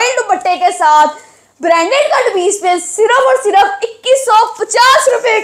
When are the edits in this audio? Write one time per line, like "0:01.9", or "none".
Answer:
none